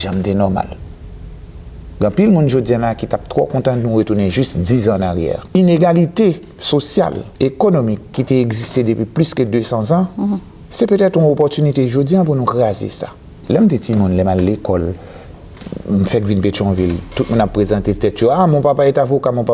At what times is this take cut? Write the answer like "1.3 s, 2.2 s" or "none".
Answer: 5.4 s, 7.2 s, 8.1 s, 13.4 s